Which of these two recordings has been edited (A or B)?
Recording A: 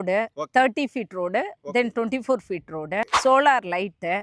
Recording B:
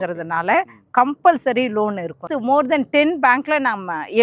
A